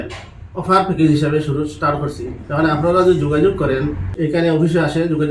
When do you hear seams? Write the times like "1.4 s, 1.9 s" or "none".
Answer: none